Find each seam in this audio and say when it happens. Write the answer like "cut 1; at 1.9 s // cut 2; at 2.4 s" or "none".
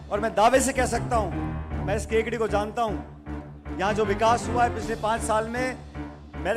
none